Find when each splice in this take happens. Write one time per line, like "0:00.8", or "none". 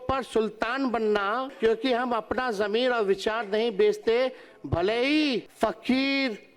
0:01.5
0:05.5